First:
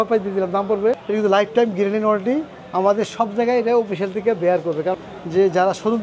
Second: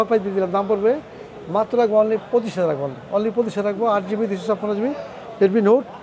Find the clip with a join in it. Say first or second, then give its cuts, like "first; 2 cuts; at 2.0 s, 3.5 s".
first; 2 cuts; at 1.0 s, 5.0 s